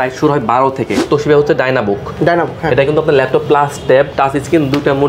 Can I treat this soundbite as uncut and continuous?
no; 1 cut; at 1.0 s

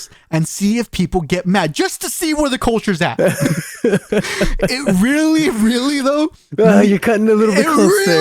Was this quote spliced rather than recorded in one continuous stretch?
no; 0 cuts

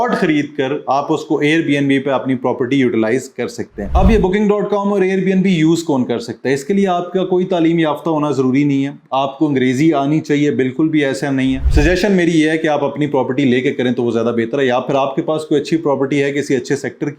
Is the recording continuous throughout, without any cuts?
no; 2 cuts; at 3.8 s, 11.6 s

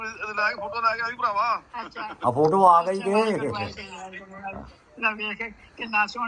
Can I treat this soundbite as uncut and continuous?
yes; 0 cuts

